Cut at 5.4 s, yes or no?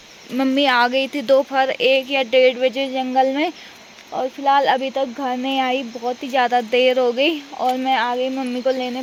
no